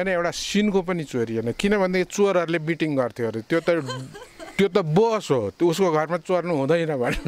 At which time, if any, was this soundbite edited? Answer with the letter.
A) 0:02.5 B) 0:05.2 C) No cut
C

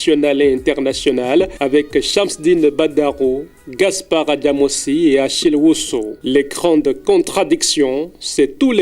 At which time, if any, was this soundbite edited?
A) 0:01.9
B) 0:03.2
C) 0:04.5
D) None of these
D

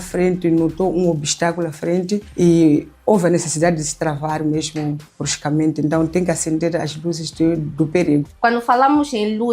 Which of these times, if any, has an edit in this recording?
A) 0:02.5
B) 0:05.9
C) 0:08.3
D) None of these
C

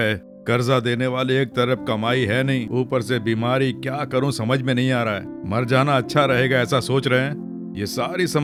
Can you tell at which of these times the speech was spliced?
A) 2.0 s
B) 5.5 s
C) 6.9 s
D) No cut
D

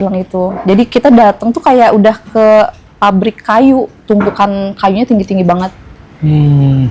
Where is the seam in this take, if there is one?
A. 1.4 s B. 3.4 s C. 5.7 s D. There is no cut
D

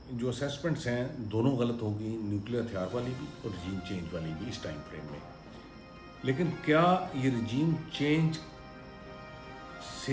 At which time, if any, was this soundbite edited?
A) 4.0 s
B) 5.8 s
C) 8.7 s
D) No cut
D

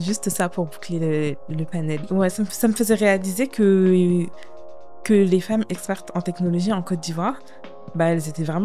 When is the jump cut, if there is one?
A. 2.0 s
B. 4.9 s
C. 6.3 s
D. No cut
A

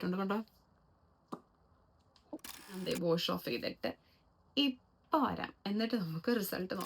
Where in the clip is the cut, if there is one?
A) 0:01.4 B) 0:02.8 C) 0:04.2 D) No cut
B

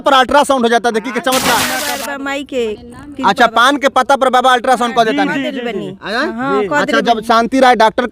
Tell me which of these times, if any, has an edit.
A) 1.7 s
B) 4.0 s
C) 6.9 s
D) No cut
A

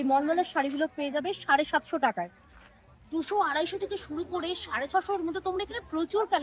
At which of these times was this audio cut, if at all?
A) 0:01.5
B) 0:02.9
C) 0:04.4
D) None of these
B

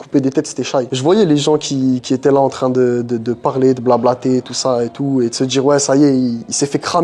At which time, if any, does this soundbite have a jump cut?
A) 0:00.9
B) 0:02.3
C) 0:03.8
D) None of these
A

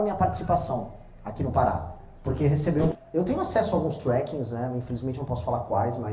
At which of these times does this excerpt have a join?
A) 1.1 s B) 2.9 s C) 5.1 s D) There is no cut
B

